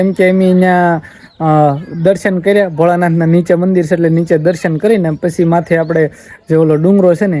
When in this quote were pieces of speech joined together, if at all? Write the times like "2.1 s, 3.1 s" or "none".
none